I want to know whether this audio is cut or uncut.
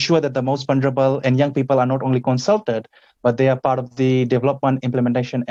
uncut